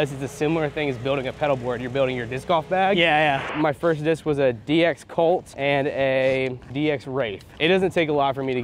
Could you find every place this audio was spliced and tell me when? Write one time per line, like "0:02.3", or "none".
0:03.5
0:05.5
0:06.9